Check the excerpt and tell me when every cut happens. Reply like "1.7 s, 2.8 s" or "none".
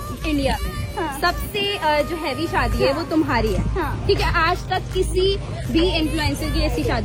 none